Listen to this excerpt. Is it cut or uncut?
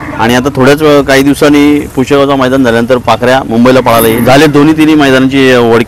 cut